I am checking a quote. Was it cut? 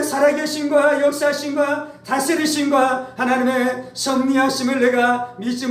no; 0 cuts

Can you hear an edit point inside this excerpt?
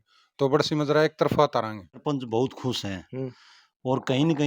yes; 1 cut; at 1.9 s

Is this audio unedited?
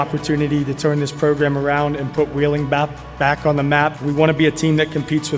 no; 1 cut; at 4.0 s

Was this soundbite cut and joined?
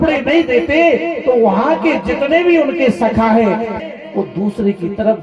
yes; 1 cut; at 3.8 s

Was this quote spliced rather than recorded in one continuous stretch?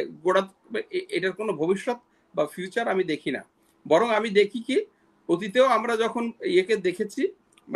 no; 0 cuts

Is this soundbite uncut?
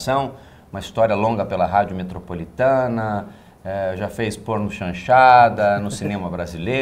yes; 0 cuts

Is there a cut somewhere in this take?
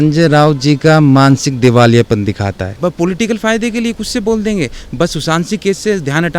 yes; 1 cut; at 2.7 s

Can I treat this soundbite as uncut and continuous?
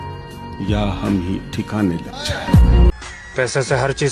yes; 0 cuts

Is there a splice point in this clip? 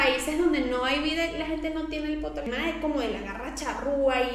yes; 1 cut; at 2.5 s

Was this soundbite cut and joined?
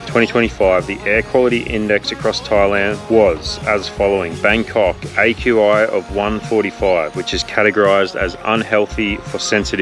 no; 0 cuts

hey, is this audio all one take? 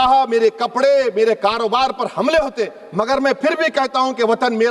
yes; 0 cuts

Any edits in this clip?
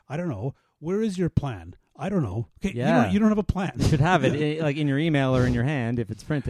no; 0 cuts

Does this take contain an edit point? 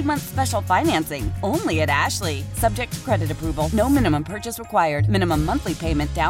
no; 0 cuts

